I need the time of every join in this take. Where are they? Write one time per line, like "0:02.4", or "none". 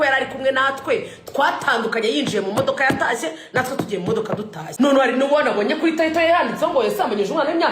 0:04.7

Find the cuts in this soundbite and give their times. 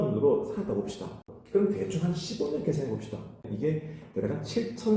0:01.3
0:03.5

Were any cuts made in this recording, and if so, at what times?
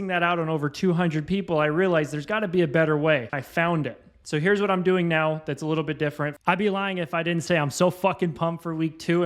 0:03.4
0:06.3

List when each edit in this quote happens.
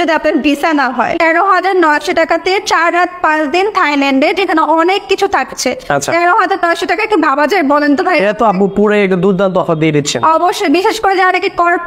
0:01.1

